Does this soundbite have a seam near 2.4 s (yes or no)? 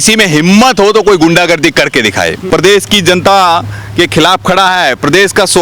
yes